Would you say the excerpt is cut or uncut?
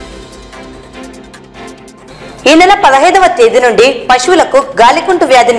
cut